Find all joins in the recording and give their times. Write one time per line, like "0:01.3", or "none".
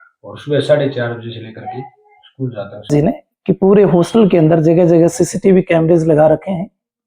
0:02.9